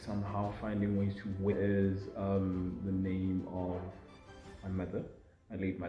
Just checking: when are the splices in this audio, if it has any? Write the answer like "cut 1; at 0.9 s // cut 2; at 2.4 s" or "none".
cut 1; at 1.5 s